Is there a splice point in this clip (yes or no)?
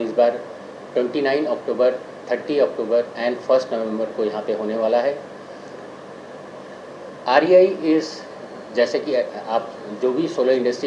no